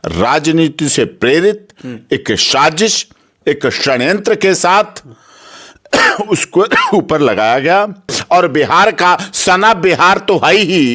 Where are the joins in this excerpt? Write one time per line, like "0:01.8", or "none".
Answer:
0:08.1